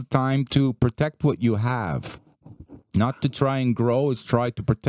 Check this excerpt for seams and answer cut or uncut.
uncut